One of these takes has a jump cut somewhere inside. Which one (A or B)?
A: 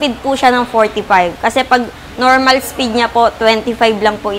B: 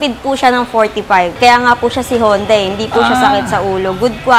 B